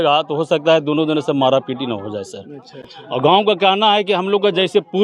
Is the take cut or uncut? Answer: uncut